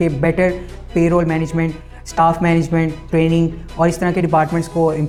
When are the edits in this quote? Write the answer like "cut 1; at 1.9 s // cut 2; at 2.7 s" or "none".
none